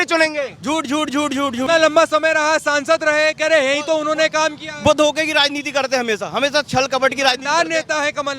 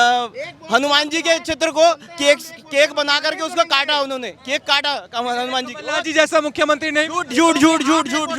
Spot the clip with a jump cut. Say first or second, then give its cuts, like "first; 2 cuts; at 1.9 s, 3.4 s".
first; 1 cut; at 1.7 s